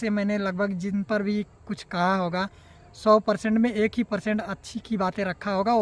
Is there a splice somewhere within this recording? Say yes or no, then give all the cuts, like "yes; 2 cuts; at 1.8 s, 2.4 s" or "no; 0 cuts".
no; 0 cuts